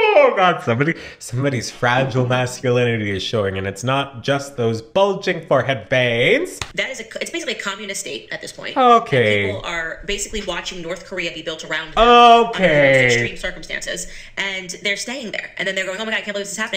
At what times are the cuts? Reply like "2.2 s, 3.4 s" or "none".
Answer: 6.6 s